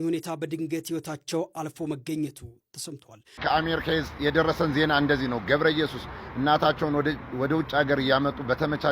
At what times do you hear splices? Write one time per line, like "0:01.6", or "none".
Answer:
0:03.4